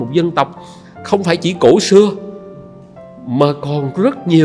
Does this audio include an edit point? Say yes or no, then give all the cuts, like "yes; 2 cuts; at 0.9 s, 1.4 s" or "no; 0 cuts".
no; 0 cuts